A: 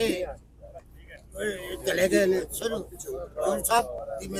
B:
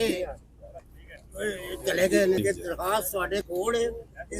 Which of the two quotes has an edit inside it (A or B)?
B